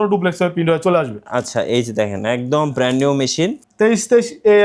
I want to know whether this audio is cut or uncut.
cut